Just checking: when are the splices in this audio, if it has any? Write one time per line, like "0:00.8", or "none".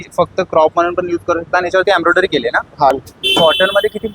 0:02.9